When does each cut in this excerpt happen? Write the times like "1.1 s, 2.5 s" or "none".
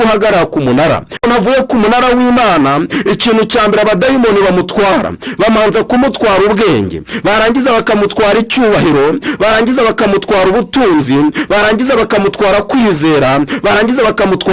1.2 s